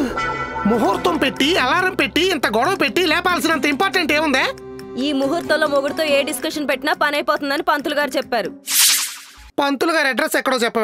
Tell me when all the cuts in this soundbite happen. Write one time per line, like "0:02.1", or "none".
none